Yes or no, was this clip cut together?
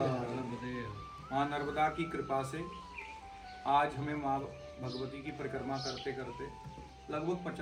no